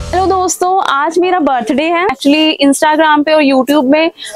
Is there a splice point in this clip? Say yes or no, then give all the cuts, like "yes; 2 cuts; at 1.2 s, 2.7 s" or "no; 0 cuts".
yes; 1 cut; at 2.1 s